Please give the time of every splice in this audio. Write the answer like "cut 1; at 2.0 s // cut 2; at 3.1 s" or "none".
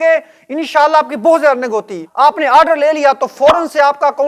cut 1; at 2.0 s